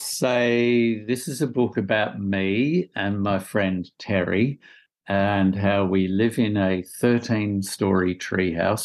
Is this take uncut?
yes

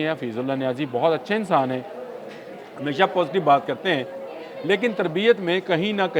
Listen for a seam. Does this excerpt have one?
no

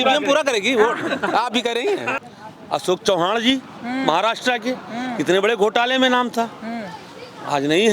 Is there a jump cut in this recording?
yes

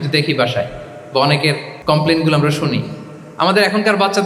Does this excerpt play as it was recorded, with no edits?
no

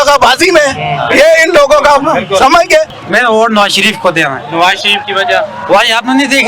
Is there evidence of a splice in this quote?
yes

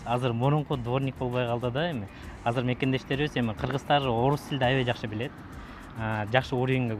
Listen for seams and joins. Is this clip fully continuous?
yes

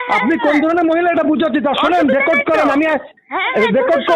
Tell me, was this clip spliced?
no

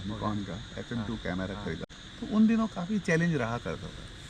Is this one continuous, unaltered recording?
no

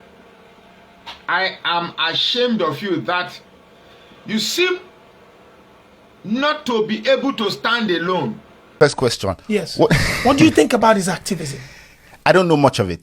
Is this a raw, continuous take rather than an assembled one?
no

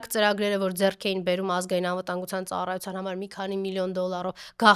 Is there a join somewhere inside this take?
no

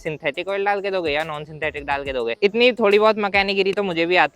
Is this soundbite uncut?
yes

